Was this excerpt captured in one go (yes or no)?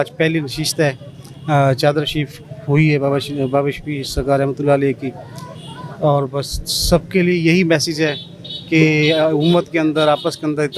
yes